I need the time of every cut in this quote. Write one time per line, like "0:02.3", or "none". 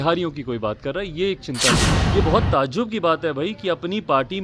0:01.9